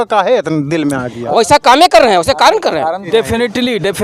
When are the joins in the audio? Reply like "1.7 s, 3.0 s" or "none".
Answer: 3.1 s